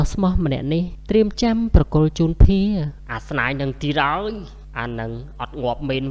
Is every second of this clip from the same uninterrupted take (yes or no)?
no